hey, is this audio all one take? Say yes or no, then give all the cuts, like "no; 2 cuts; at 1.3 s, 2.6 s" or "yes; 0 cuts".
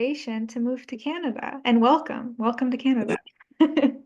yes; 0 cuts